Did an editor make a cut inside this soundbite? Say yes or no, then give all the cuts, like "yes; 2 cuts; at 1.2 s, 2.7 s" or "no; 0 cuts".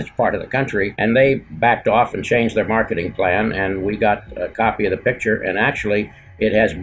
yes; 2 cuts; at 0.9 s, 1.5 s